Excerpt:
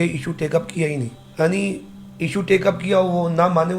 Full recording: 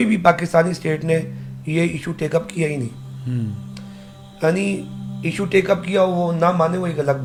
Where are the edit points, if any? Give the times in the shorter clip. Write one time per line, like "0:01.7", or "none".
0:01.2